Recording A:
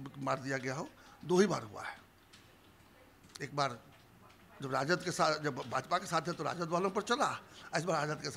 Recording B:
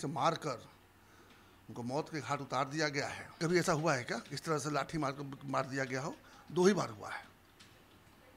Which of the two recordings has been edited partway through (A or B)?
B